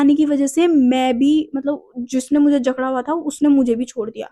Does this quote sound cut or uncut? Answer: uncut